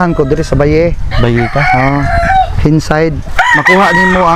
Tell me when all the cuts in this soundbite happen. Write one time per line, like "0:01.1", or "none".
0:03.2